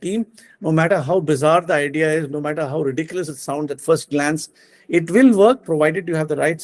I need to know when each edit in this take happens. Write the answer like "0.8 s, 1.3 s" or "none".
none